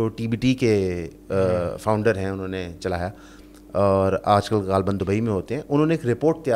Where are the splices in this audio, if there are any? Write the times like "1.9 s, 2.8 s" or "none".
none